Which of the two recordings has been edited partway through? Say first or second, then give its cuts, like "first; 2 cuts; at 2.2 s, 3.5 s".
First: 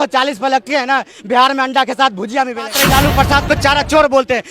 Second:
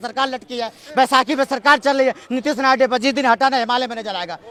first; 1 cut; at 2.7 s